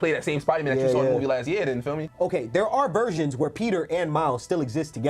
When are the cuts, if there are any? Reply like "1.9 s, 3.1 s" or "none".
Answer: 2.1 s